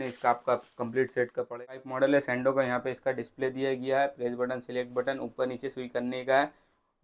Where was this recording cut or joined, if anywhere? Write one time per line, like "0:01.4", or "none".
0:01.4